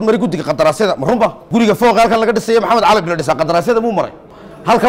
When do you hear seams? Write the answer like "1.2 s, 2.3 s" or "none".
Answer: 1.4 s